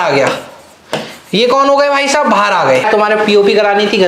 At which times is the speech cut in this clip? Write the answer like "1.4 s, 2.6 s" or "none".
2.8 s